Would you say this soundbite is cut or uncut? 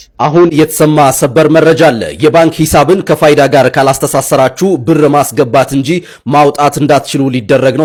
uncut